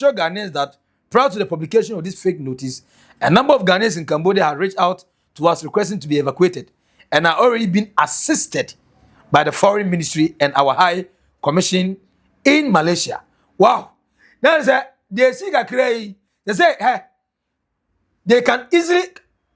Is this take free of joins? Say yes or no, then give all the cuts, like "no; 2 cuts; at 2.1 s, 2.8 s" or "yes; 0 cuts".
yes; 0 cuts